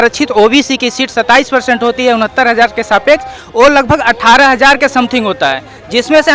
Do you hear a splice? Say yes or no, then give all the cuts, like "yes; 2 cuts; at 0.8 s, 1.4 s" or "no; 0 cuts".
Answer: no; 0 cuts